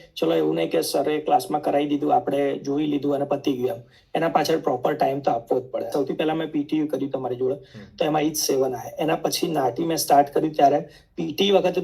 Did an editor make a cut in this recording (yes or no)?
yes